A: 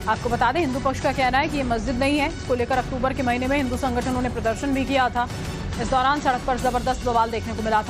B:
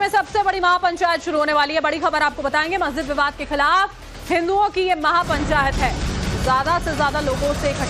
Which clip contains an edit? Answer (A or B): A